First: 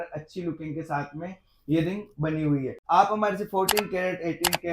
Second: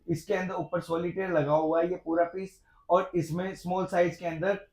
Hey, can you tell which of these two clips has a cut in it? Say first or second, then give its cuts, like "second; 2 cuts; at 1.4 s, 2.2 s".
first; 1 cut; at 2.8 s